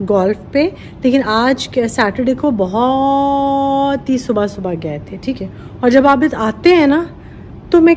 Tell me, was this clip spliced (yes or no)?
yes